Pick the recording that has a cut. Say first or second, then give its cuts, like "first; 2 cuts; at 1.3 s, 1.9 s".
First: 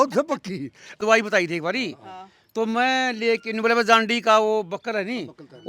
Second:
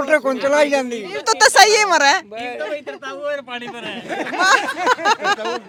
first; 1 cut; at 0.9 s